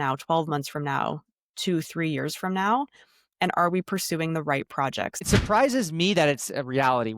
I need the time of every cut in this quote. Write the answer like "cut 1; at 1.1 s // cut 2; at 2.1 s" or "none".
cut 1; at 5.2 s

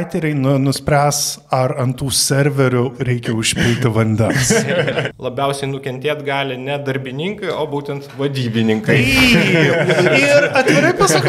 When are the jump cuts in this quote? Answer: cut 1; at 5.1 s

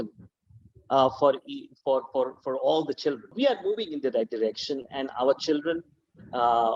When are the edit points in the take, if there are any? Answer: cut 1; at 3.3 s

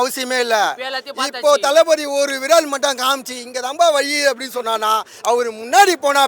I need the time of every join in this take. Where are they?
none

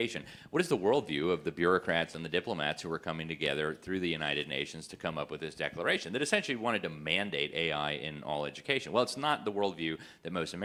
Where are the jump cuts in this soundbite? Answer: none

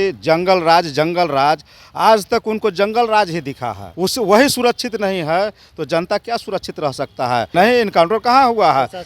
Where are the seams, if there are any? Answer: cut 1; at 3.8 s // cut 2; at 7.5 s

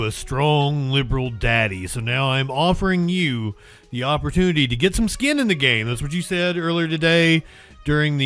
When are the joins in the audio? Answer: none

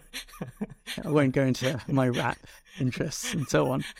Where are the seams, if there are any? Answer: none

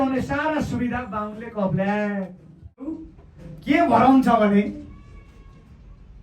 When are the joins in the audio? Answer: cut 1; at 2.9 s

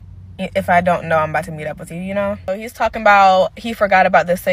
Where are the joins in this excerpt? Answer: cut 1; at 2.5 s

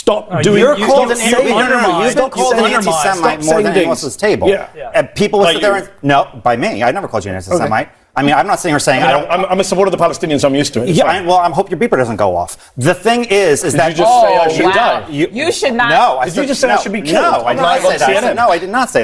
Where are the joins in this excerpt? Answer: none

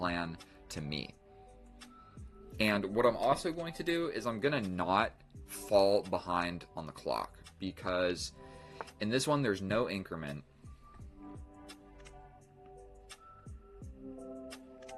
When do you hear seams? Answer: none

